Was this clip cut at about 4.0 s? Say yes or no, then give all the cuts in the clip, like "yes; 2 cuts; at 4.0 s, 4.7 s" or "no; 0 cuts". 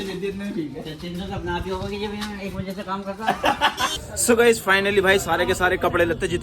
yes; 1 cut; at 4.0 s